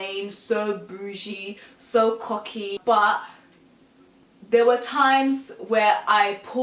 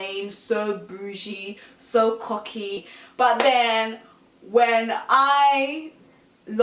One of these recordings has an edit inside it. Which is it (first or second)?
first